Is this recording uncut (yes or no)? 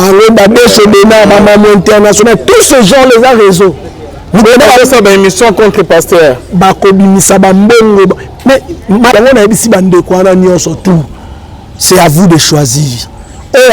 no